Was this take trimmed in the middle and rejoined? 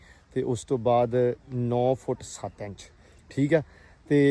no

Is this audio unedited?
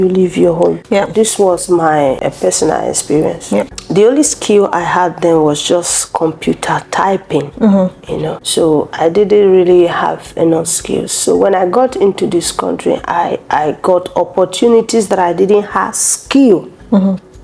no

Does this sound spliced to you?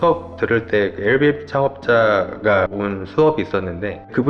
yes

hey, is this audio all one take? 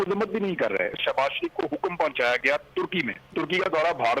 no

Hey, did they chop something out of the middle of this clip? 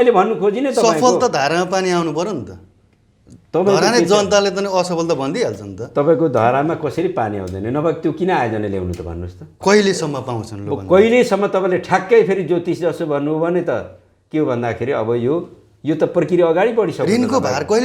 yes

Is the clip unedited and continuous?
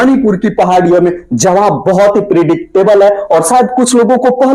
yes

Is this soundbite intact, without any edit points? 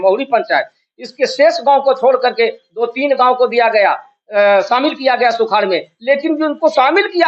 yes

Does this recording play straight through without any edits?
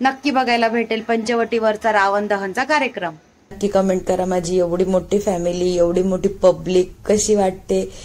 no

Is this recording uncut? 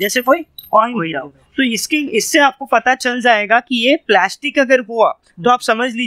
yes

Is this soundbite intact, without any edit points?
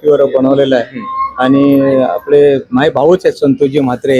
yes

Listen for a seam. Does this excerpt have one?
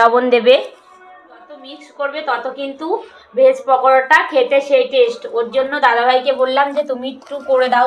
yes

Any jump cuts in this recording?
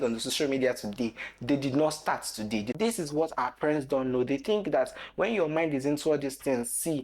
yes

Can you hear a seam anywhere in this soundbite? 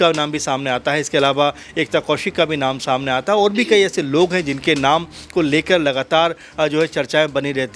no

